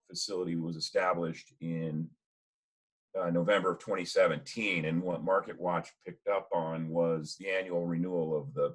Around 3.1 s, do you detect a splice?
no; 1 cut; at 7.3 s

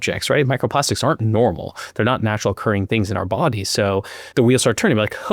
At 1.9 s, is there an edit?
no; 1 cut; at 4.2 s

